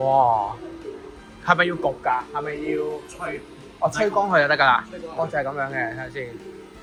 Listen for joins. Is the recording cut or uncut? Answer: uncut